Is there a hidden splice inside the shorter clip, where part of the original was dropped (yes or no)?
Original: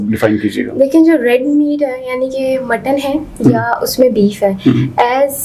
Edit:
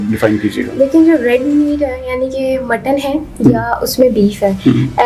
no